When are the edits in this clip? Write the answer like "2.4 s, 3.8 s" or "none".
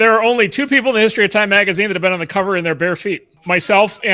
none